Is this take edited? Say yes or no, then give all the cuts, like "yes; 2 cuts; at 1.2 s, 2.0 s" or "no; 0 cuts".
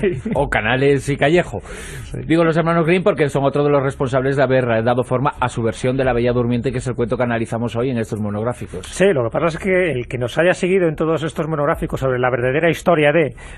yes; 1 cut; at 9.1 s